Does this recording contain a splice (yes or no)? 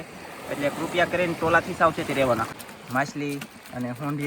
yes